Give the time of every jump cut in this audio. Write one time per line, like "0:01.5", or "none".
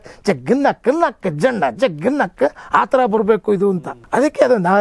0:03.8